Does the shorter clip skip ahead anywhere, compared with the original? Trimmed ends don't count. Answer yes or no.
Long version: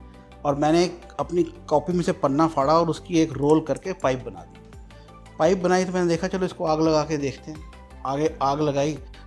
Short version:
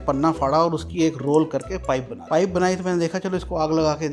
yes